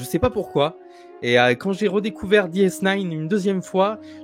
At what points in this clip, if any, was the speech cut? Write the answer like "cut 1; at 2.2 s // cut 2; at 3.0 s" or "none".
none